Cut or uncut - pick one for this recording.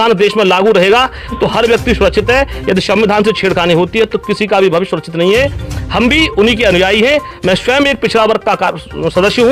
uncut